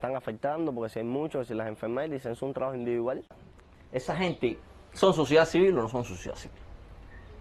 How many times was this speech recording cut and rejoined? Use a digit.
1